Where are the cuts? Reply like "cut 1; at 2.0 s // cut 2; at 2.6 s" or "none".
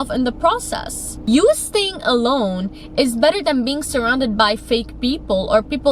cut 1; at 1.1 s